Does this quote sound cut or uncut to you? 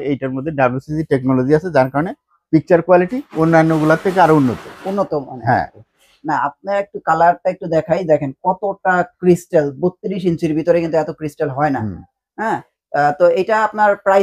uncut